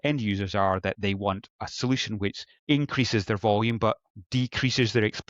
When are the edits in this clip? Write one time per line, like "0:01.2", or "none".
0:02.5
0:04.1